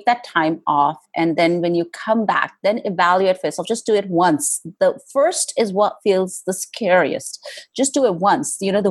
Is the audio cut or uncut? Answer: uncut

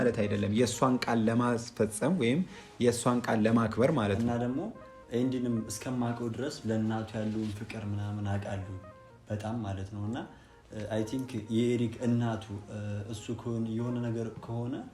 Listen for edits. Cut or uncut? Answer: cut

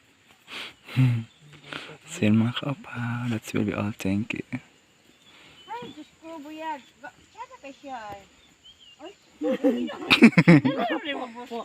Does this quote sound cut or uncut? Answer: uncut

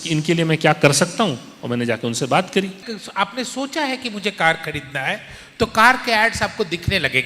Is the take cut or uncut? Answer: cut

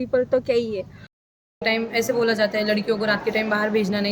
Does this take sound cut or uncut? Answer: cut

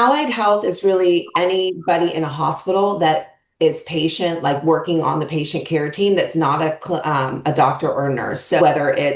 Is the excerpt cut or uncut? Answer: uncut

